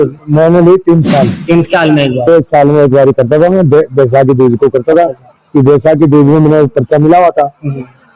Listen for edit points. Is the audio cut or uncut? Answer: cut